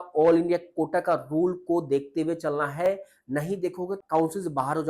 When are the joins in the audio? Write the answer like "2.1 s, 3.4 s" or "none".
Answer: 4.0 s